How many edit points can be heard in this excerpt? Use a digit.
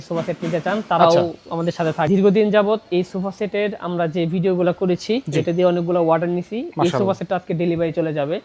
1